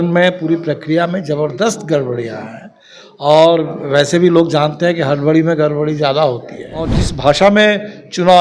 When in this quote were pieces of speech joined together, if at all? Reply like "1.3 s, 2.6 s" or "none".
7.0 s